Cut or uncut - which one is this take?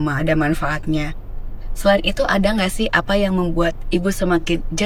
uncut